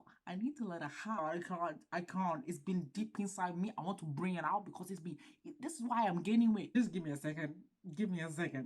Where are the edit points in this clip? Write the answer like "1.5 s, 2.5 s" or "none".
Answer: 1.2 s, 6.7 s

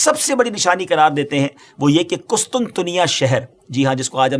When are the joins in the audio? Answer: none

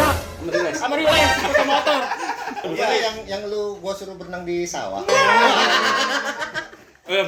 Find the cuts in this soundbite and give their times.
2.6 s

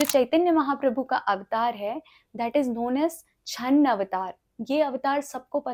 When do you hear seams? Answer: none

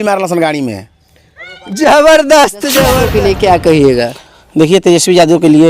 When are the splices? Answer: 3.0 s

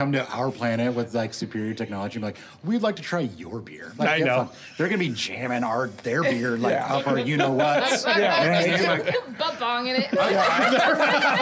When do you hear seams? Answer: none

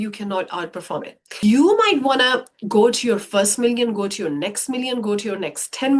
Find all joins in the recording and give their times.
1.4 s

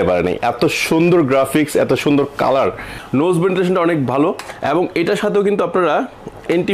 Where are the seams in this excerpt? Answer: 2.9 s

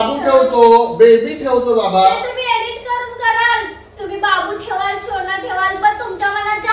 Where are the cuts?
none

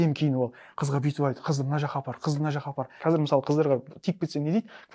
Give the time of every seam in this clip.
3.0 s

